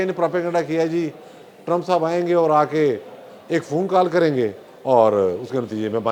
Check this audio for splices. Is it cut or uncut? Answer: uncut